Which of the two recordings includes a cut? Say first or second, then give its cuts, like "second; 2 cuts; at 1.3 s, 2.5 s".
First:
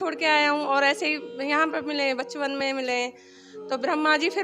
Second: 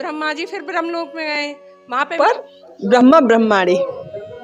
second; 1 cut; at 2.2 s